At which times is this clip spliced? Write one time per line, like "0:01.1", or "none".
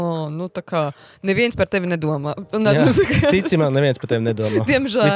none

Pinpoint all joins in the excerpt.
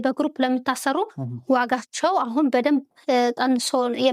none

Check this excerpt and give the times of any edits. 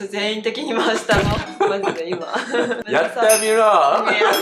0:02.8

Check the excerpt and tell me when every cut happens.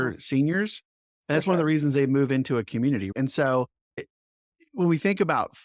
0:03.1
0:04.1

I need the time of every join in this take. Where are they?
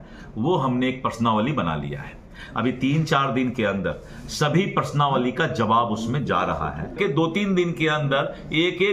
0:06.9

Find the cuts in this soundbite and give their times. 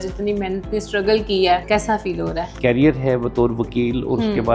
0:02.1

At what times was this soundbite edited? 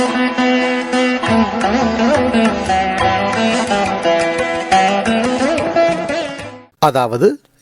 0:06.6

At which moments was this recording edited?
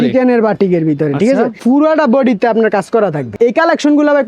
0:01.6
0:03.3

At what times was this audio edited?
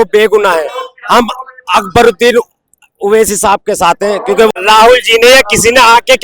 0:04.5

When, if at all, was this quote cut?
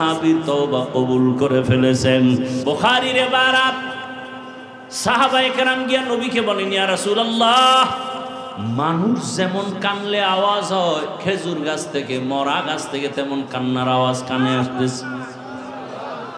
0:02.6

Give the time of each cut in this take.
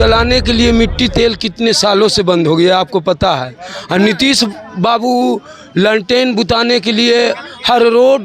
none

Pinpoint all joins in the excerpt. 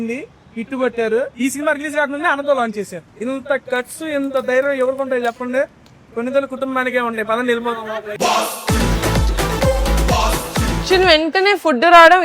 0:01.3
0:03.0
0:10.8

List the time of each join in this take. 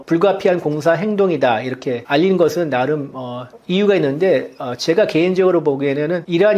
none

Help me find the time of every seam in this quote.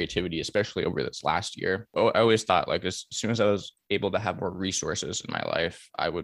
0:01.9

